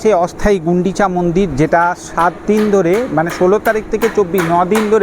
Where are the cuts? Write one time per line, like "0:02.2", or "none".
none